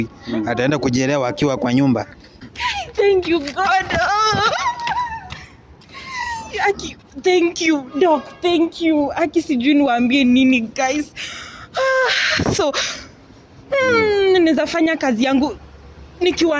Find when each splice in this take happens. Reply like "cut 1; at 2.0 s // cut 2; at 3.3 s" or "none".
cut 1; at 2.1 s